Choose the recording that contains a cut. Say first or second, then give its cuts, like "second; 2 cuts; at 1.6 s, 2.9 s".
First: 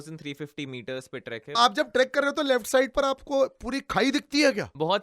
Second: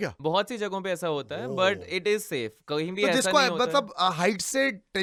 first; 1 cut; at 1.5 s